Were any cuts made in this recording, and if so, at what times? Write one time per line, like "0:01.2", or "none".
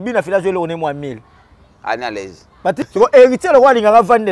0:02.8